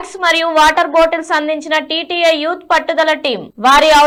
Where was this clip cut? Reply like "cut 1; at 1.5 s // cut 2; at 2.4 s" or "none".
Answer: none